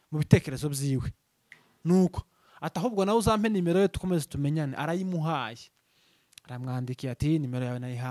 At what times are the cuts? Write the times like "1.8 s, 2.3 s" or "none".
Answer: none